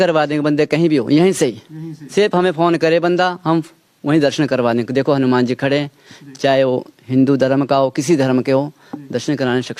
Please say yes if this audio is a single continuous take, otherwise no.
yes